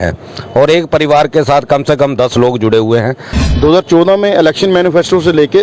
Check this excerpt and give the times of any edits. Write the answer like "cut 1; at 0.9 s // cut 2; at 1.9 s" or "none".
cut 1; at 3.4 s